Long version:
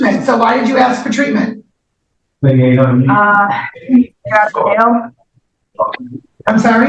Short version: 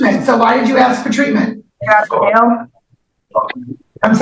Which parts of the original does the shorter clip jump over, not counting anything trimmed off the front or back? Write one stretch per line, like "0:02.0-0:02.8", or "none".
0:01.7-0:04.2